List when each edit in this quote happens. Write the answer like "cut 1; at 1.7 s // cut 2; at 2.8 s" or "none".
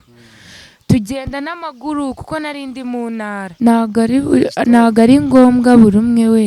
cut 1; at 3.5 s